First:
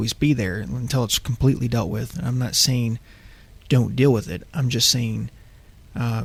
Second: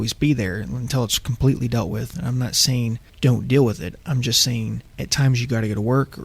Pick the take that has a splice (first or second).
second